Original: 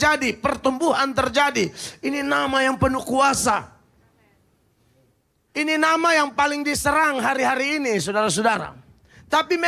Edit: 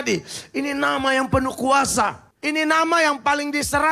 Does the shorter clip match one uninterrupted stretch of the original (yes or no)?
no